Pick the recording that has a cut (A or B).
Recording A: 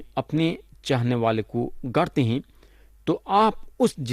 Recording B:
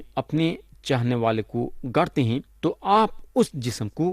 B